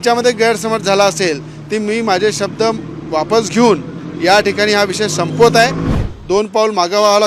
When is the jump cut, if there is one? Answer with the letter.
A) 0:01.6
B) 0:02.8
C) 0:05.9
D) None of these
C